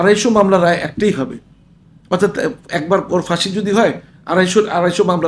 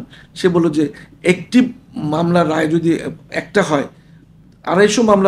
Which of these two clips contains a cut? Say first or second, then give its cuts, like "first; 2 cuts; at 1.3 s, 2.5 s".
second; 1 cut; at 3.2 s